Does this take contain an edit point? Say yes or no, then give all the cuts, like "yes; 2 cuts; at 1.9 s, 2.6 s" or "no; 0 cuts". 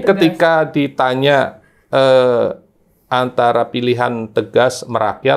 no; 0 cuts